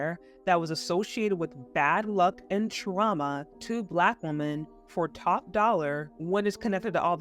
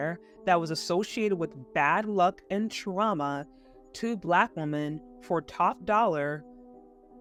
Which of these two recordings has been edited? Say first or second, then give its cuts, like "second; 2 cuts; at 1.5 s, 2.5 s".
first; 2 cuts; at 3.5 s, 6.1 s